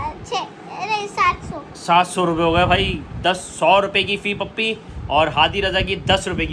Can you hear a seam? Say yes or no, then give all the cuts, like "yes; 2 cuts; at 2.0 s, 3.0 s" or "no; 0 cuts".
no; 0 cuts